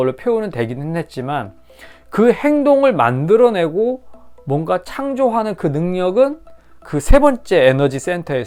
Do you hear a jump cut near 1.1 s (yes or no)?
no